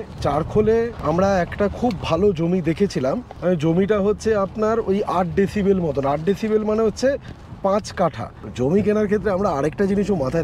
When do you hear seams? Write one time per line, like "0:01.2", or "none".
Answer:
0:01.0
0:03.3
0:08.4

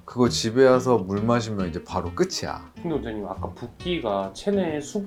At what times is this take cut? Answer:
none

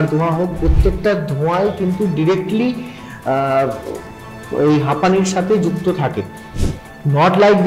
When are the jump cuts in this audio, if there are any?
none

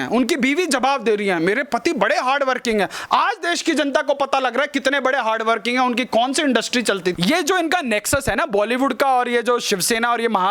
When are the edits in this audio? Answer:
0:07.1

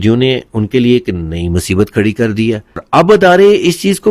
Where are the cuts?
0:02.8

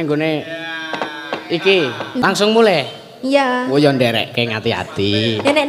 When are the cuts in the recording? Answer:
0:02.2

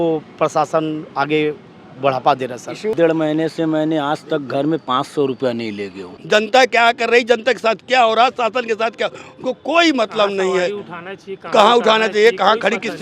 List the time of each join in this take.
0:02.9
0:06.1

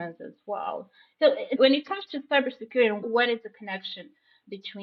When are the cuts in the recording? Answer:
none

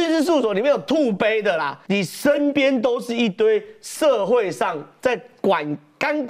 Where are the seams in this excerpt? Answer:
0:01.8

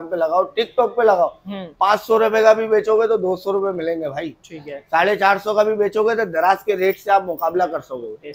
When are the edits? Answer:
none

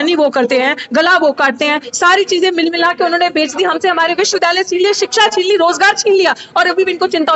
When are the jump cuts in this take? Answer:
none

